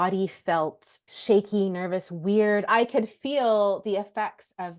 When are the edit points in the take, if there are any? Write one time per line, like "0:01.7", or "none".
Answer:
0:01.1
0:02.7

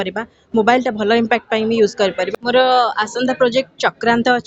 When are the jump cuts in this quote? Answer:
0:02.3

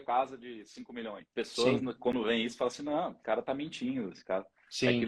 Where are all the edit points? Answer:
0:01.2
0:02.1
0:03.2

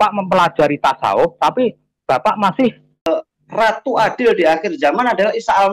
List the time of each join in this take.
0:03.1

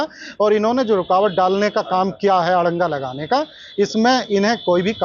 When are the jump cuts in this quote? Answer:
none

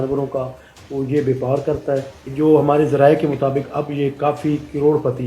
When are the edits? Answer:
0:02.2

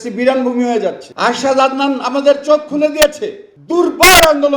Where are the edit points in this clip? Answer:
0:01.1
0:03.5

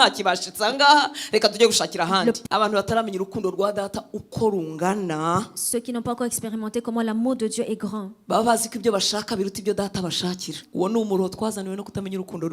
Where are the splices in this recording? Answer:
0:02.4
0:10.6

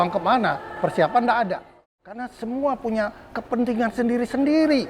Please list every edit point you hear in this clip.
0:01.7

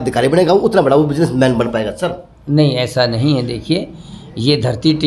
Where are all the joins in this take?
none

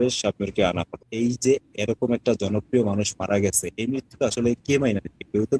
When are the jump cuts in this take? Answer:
0:01.0

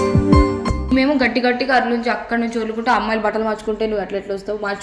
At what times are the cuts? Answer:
0:00.9

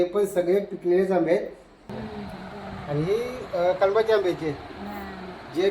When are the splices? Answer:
0:01.7

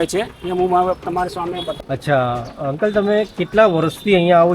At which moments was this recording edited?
0:01.7

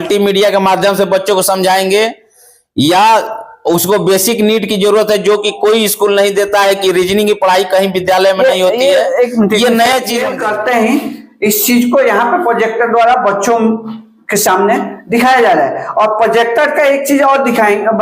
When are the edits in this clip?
0:10.3

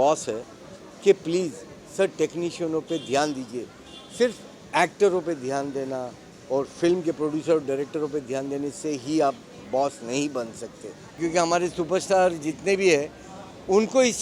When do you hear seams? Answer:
0:11.2

